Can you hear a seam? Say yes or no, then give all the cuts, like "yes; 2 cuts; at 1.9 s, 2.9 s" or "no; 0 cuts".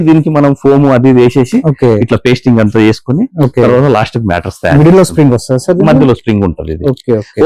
no; 0 cuts